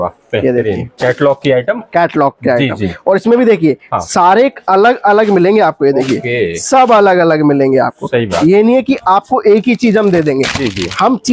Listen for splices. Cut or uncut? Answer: uncut